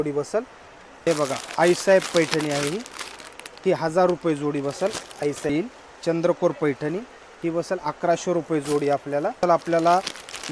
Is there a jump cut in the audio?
yes; 3 cuts; at 1.1 s, 5.5 s, 9.4 s

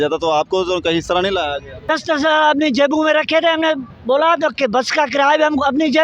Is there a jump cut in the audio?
yes; 1 cut; at 1.8 s

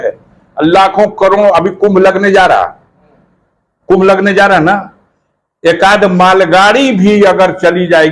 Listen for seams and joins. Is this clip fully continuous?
yes; 0 cuts

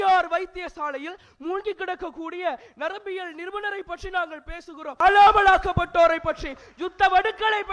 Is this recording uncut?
no; 1 cut; at 5.0 s

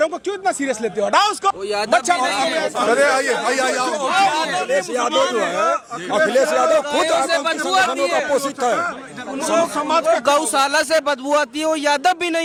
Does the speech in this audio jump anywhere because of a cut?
no; 0 cuts

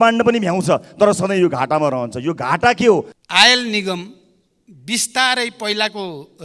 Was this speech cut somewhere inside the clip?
yes; 1 cut; at 3.2 s

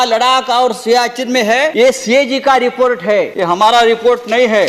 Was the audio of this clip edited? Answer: yes; 2 cuts; at 1.7 s, 3.3 s

